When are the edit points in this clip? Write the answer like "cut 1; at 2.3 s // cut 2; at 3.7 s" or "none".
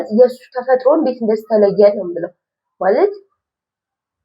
none